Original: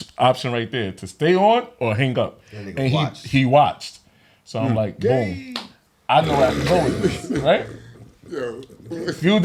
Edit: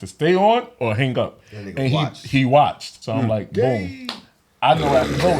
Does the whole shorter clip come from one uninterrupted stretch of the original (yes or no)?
no